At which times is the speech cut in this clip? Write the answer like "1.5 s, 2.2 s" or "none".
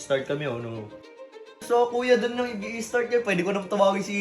1.2 s